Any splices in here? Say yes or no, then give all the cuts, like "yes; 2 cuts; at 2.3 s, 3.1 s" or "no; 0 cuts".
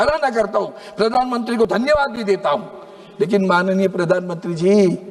no; 0 cuts